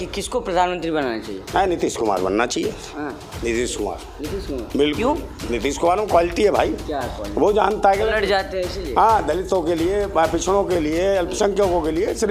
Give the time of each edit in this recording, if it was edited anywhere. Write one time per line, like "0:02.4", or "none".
none